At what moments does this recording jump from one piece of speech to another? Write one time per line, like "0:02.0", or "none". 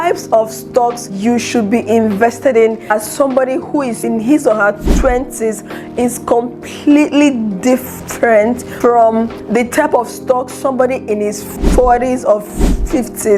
0:01.0

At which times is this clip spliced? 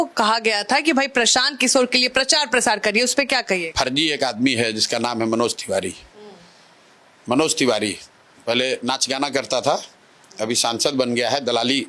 0:03.7

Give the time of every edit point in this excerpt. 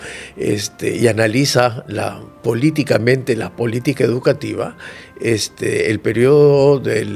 none

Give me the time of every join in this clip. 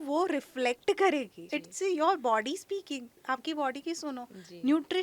0:01.6
0:03.2

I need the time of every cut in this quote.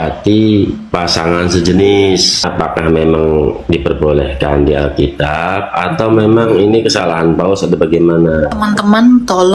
0:02.4
0:08.5

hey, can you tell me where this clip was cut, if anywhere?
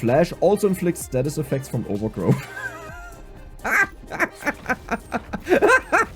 none

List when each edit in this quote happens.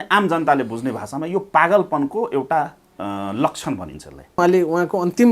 0:04.4

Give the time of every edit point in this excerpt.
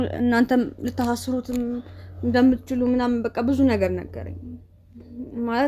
none

